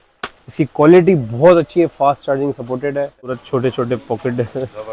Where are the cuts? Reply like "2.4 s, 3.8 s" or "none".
3.4 s